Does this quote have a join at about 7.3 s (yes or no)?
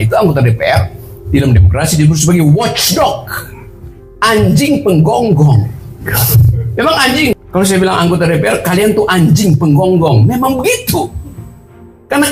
yes